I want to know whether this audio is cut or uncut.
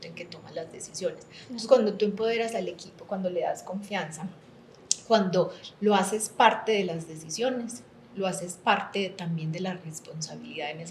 uncut